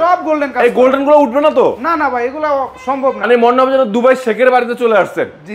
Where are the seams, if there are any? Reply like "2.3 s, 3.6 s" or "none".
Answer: 3.2 s